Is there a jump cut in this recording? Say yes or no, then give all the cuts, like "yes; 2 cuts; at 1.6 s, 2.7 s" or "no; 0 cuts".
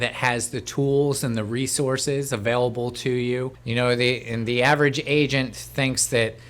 yes; 1 cut; at 3.6 s